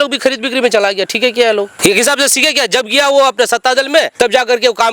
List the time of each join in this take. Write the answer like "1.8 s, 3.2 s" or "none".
1.7 s, 4.1 s